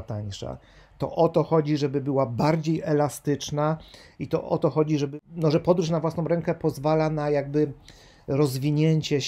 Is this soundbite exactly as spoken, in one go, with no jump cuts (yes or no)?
no